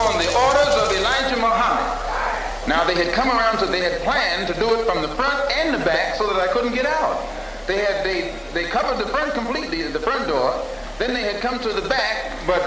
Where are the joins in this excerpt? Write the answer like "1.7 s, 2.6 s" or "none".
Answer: none